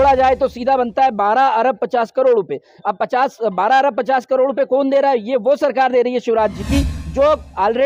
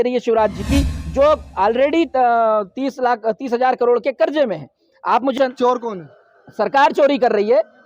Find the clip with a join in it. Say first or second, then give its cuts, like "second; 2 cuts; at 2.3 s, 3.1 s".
second; 1 cut; at 5.3 s